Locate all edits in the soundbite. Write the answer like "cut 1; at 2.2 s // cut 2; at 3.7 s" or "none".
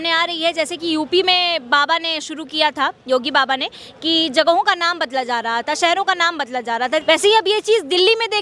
cut 1; at 7.0 s